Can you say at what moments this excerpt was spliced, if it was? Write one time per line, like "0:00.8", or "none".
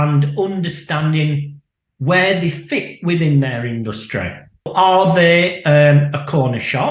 0:04.7